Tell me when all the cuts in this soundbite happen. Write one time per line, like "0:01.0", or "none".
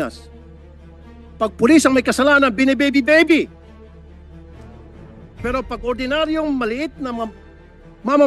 0:03.5
0:05.4